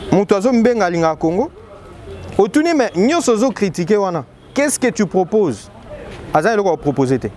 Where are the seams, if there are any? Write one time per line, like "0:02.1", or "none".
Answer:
none